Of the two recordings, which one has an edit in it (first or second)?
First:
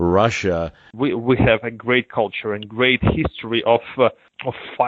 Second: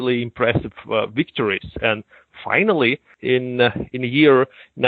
first